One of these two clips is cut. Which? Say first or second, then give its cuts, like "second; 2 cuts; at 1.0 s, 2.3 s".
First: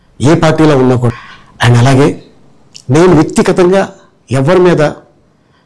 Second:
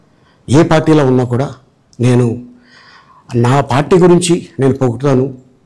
first; 1 cut; at 1.1 s